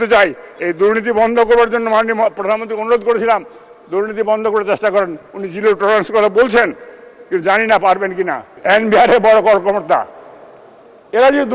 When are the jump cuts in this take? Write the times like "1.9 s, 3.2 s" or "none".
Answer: 8.5 s